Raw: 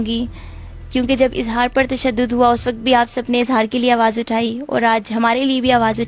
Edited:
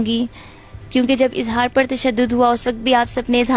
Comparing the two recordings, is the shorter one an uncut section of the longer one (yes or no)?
yes